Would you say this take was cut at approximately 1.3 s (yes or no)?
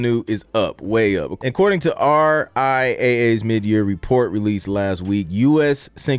yes